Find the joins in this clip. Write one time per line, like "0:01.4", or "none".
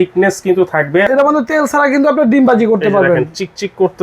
0:01.1